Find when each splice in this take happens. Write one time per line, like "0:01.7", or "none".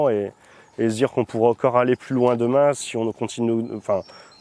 none